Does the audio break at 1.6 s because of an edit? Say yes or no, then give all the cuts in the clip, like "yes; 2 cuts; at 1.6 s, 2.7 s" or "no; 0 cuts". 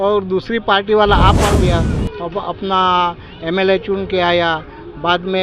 yes; 1 cut; at 1.6 s